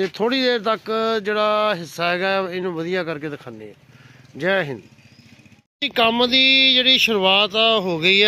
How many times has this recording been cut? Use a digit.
0